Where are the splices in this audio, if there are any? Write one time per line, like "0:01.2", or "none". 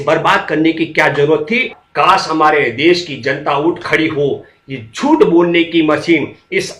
0:01.8